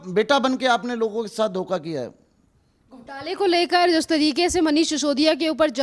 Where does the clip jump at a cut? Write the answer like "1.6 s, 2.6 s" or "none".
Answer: none